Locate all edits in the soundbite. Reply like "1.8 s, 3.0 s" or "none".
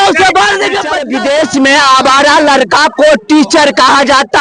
1.0 s